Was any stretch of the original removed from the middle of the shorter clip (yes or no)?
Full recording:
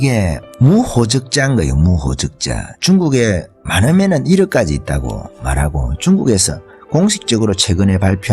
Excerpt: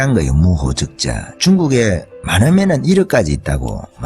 no